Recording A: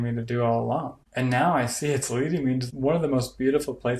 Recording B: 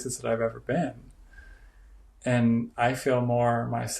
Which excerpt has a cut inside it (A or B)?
A